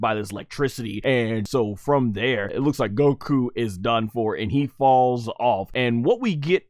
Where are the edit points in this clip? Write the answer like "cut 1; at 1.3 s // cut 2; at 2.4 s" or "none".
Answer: cut 1; at 1.2 s // cut 2; at 2.5 s // cut 3; at 5.7 s